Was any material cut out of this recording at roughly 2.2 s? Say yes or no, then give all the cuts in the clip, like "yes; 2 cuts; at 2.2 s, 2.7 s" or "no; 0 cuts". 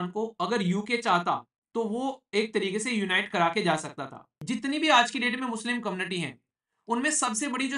no; 1 cut; at 4.3 s